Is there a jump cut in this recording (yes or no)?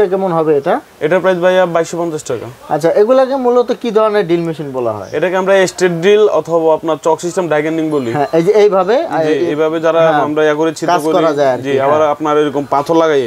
no